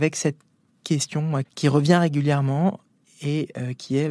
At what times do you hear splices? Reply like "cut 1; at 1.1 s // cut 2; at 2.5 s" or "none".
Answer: cut 1; at 1.5 s